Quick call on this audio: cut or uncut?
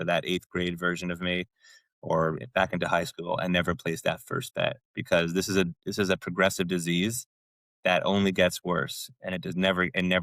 uncut